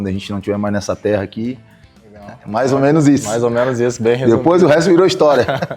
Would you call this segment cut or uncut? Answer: cut